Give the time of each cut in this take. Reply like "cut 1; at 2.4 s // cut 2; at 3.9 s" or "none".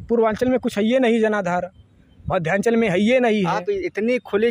none

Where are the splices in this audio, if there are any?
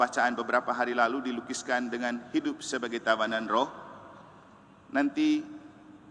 none

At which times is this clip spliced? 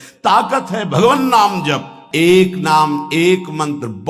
cut 1; at 2.0 s

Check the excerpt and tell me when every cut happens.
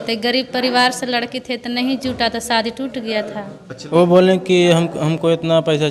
cut 1; at 3.7 s

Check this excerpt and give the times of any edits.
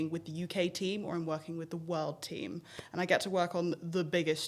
none

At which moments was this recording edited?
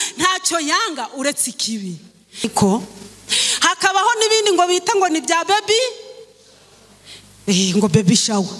cut 1; at 2.5 s

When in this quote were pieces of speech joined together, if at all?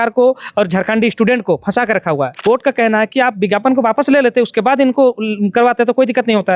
cut 1; at 2.3 s

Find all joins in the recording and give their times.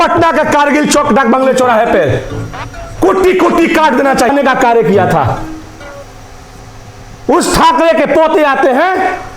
cut 1; at 4.3 s

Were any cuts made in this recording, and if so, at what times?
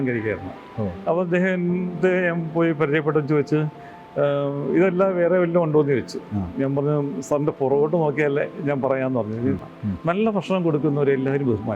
cut 1; at 9.6 s

